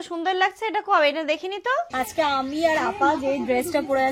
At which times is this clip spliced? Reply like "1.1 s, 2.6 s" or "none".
1.9 s